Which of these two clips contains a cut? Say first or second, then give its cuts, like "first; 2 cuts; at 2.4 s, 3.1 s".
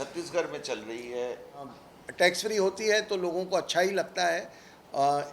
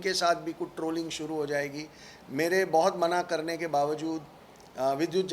first; 1 cut; at 1.8 s